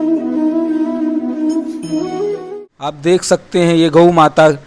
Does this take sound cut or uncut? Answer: cut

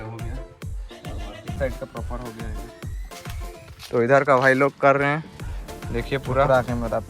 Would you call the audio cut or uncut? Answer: cut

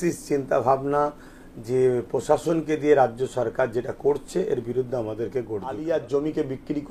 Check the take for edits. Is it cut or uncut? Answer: cut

